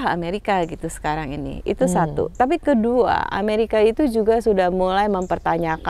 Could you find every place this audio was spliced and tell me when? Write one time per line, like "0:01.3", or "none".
none